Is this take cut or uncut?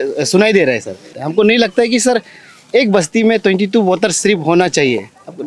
cut